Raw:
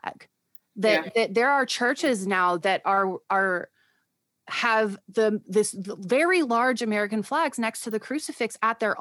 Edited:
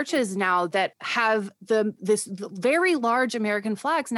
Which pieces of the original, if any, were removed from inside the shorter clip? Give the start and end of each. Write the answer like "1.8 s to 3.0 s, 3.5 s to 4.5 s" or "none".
2.8 s to 4.4 s